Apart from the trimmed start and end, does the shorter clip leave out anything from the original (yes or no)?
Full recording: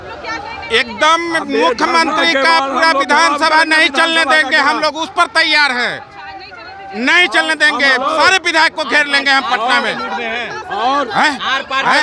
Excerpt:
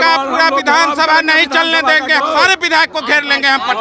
yes